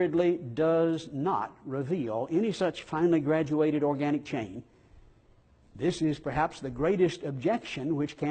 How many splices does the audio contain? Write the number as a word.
one